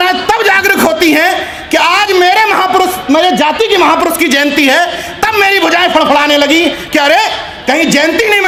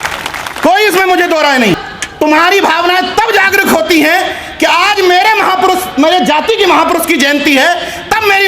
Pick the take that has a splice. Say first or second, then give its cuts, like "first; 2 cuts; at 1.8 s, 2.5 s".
second; 1 cut; at 1.8 s